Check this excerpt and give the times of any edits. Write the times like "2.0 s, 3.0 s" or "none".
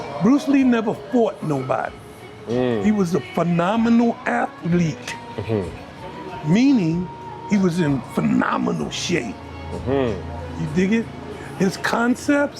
none

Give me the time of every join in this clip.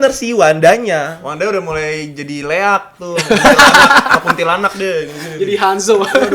none

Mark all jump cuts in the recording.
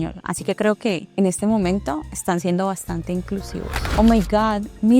3.8 s

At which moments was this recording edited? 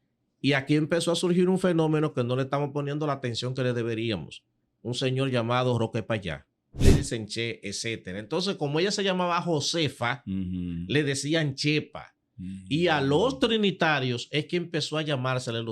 6.8 s

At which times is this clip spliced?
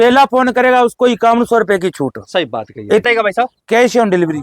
3.0 s

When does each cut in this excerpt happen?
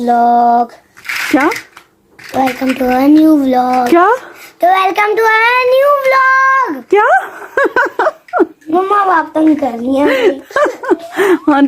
none

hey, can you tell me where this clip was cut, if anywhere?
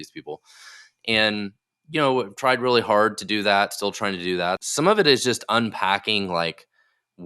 4.6 s

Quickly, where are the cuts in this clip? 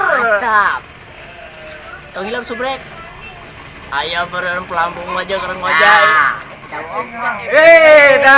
7.0 s

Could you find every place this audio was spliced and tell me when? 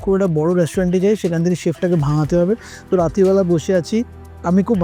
none

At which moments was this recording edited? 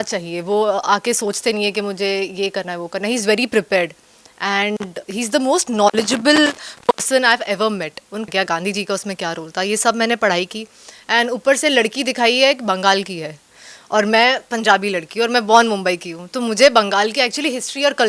8.3 s

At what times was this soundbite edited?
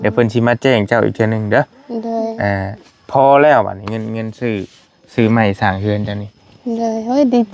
none

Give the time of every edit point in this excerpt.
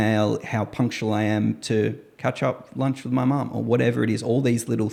none

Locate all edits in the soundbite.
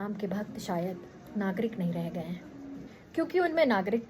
1.1 s, 2.9 s

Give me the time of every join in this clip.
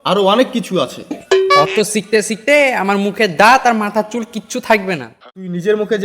5.1 s

